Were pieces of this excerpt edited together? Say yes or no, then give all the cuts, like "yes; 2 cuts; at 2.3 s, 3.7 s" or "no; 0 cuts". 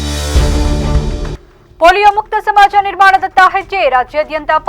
yes; 1 cut; at 1.3 s